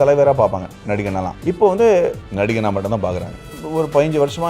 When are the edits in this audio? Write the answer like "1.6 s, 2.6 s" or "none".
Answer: 1.3 s, 2.2 s, 3.6 s